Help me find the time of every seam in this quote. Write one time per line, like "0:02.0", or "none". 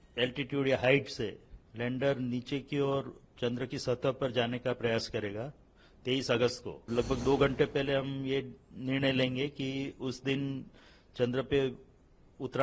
0:06.9